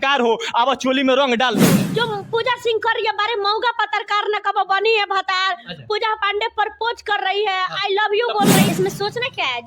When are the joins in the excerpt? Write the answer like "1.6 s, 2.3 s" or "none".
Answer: 1.8 s, 8.6 s